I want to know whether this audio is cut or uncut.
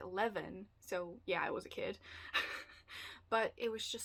uncut